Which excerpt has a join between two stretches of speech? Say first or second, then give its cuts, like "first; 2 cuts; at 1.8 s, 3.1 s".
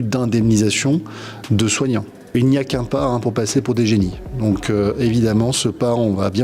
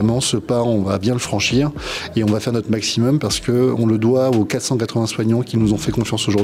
first; 1 cut; at 2.3 s